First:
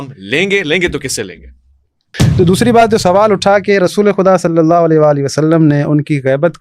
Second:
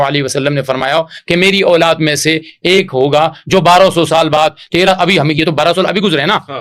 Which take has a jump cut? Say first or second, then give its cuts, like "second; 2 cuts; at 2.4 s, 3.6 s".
first; 1 cut; at 2.2 s